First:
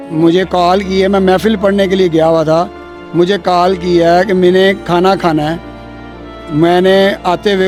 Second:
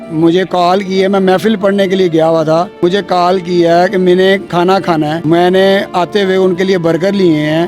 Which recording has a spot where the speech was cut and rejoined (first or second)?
second